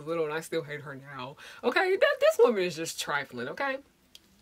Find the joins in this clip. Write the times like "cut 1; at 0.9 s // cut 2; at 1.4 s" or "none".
none